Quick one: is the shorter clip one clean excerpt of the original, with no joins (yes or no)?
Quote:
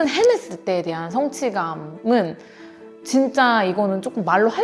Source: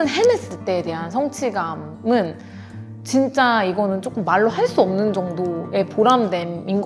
yes